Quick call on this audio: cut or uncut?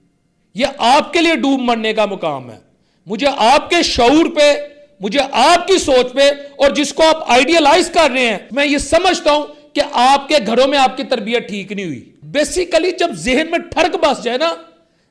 cut